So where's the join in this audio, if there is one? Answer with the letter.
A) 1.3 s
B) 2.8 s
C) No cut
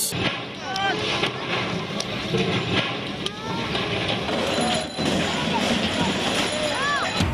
C